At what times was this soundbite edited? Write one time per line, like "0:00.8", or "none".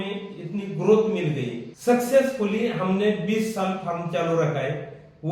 0:01.6